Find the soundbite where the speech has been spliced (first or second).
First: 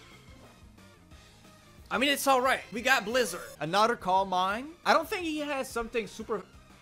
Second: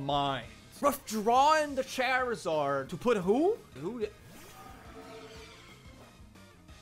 first